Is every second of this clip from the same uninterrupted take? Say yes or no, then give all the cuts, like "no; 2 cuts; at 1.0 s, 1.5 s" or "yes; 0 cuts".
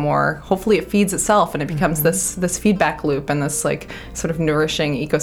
yes; 0 cuts